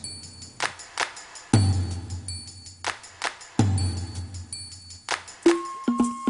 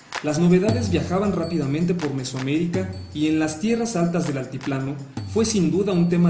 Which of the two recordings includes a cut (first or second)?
first